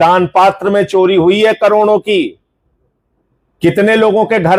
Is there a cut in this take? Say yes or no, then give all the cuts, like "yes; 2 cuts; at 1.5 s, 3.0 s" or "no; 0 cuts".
no; 0 cuts